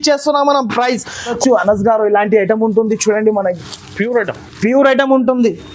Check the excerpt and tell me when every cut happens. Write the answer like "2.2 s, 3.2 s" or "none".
1.3 s